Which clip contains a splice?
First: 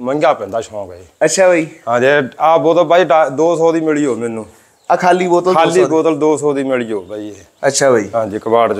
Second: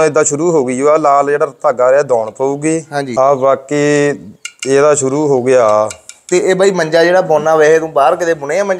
second; 1 cut; at 3.1 s

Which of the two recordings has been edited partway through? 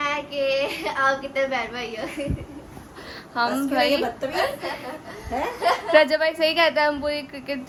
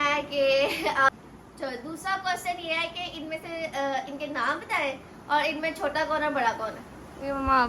second; 1 cut; at 1.1 s

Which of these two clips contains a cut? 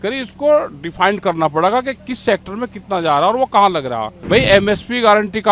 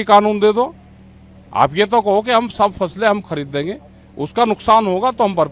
first; 1 cut; at 4.1 s

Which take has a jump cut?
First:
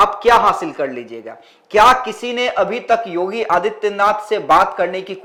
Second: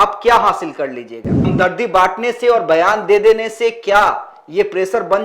second; 1 cut; at 1.4 s

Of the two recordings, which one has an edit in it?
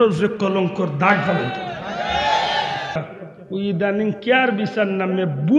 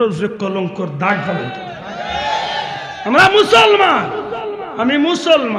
first; 1 cut; at 3.0 s

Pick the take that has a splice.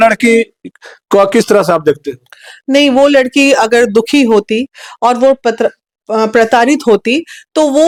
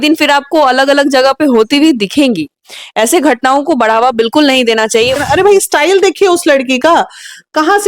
second; 1 cut; at 5.1 s

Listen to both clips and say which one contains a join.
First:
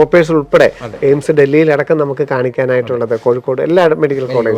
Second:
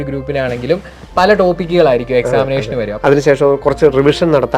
second; 1 cut; at 2.9 s

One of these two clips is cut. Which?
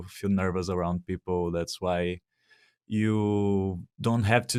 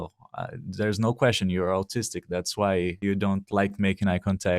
second; 1 cut; at 3.0 s

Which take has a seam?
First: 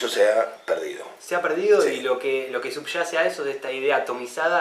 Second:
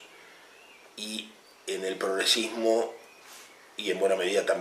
second; 1 cut; at 1.7 s

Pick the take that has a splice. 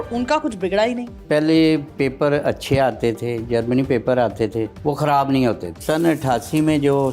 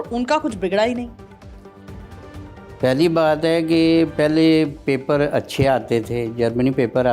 first; 3 cuts; at 1.2 s, 4.7 s, 5.8 s

